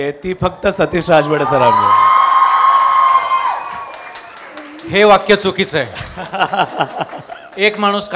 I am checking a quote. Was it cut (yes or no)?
no